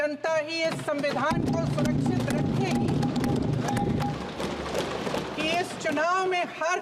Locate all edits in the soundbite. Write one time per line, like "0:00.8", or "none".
none